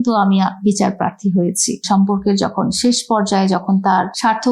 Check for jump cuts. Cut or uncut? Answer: cut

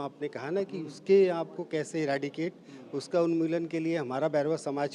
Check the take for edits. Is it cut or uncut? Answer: uncut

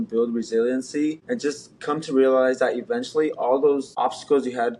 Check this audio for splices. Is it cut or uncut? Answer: cut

